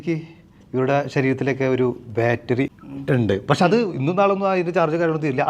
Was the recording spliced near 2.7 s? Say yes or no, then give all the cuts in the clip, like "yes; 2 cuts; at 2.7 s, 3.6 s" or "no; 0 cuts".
yes; 1 cut; at 2.7 s